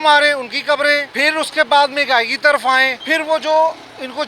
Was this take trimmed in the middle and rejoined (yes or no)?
yes